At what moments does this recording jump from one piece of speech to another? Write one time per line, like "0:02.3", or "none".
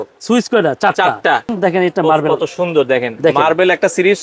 0:01.6